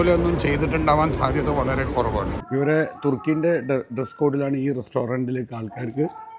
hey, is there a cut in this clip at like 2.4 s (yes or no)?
yes